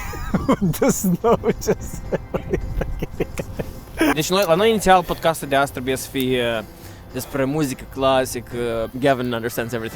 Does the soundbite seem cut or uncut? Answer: cut